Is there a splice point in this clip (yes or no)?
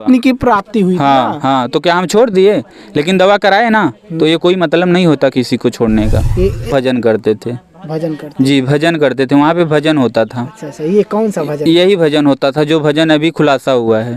yes